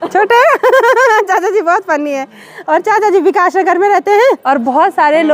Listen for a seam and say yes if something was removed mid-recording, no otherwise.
no